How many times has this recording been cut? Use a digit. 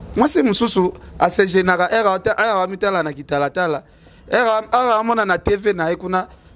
0